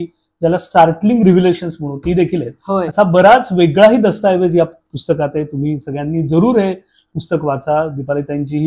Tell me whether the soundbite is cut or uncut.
uncut